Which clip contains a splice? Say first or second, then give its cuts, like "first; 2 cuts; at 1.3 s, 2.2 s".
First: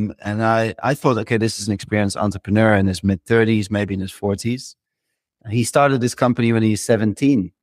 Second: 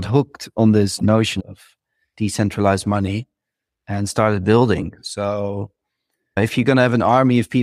second; 1 cut; at 6.4 s